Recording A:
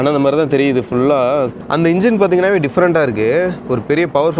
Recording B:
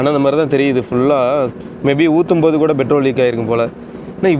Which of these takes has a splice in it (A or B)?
A